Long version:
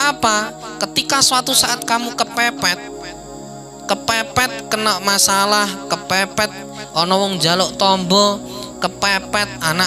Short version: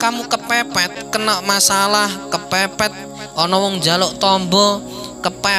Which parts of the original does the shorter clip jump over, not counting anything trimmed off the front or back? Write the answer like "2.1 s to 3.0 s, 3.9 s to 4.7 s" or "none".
2.9 s to 4.6 s